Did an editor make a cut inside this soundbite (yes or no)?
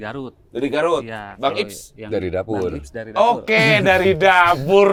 no